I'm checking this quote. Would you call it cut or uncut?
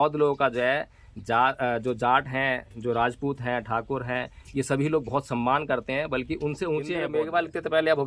cut